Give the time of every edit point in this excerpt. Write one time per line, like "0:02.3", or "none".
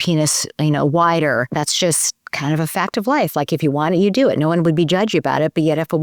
0:01.5